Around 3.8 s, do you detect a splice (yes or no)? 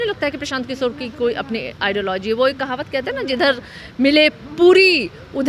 no